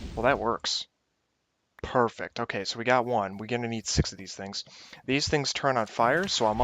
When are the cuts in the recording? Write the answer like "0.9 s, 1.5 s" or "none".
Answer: 4.4 s